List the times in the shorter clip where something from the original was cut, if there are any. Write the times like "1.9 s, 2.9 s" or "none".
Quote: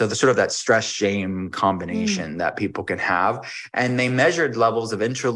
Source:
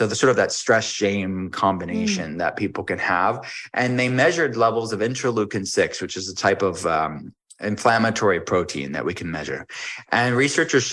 none